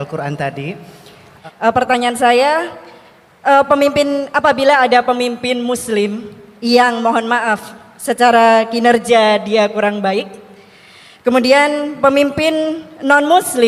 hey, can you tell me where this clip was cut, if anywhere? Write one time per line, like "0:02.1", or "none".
0:01.2